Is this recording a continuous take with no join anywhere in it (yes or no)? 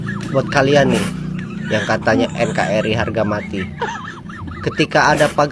yes